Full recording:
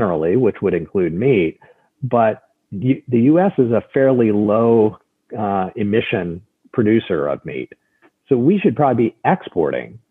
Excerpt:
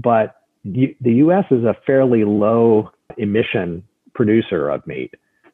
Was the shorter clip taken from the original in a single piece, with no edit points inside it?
no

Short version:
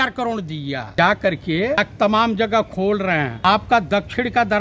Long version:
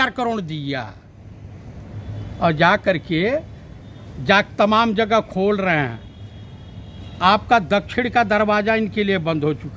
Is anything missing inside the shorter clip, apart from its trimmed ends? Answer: yes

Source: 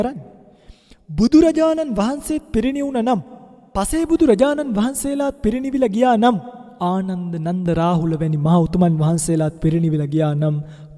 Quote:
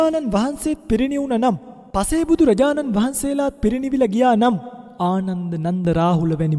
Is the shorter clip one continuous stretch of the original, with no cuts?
no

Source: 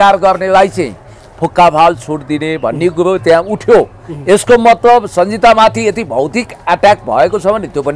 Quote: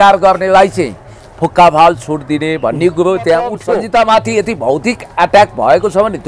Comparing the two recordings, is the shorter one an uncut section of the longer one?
no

